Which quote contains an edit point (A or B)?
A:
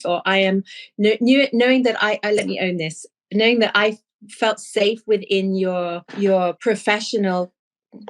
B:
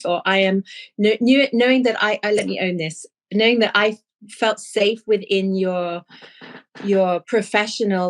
A